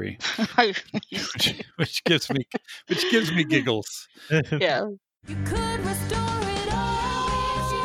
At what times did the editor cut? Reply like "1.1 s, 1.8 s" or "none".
5.2 s